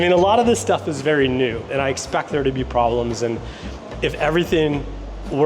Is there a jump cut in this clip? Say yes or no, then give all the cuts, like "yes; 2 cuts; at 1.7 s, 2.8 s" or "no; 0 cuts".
yes; 1 cut; at 1.7 s